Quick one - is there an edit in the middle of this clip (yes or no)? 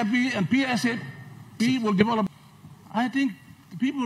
yes